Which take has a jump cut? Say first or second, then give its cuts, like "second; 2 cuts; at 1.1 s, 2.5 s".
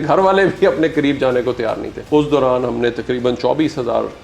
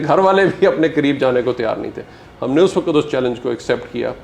first; 1 cut; at 1.9 s